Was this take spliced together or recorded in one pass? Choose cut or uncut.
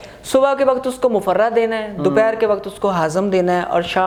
uncut